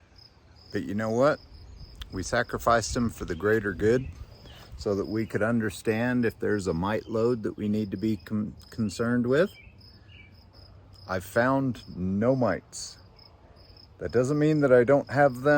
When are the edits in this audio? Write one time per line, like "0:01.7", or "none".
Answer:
0:10.6